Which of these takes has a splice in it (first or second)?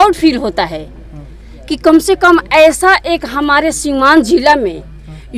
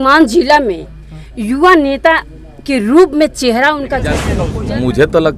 second